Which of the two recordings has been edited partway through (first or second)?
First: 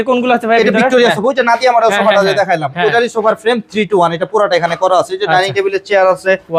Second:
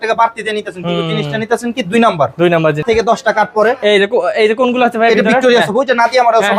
second